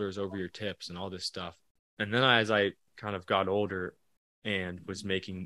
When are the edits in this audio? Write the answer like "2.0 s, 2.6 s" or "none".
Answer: 1.6 s, 2.9 s